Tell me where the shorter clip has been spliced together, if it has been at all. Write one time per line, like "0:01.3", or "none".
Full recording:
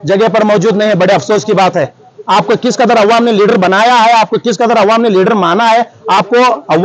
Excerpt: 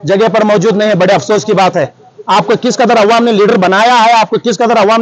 none